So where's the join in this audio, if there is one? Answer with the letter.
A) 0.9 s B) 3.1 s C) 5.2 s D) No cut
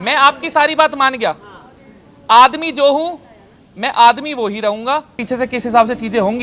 C